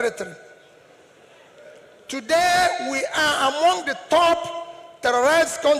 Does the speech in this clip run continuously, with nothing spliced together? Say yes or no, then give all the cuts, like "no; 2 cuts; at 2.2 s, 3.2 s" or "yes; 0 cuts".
yes; 0 cuts